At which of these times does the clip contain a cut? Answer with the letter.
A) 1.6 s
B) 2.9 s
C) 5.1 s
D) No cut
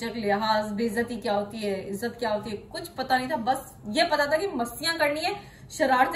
D